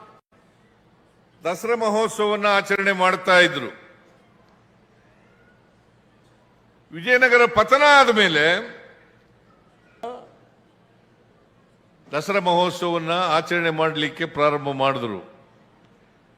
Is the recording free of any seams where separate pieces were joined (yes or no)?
no